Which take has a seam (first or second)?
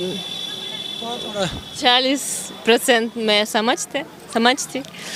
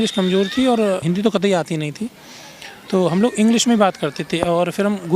second